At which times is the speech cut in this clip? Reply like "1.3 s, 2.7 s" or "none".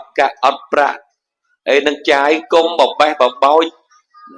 none